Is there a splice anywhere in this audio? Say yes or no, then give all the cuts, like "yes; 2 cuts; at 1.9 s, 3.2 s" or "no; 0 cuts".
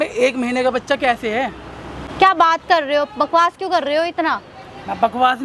no; 0 cuts